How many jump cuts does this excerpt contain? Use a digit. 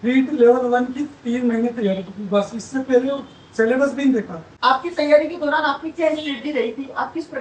1